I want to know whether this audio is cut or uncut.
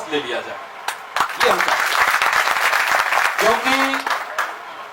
uncut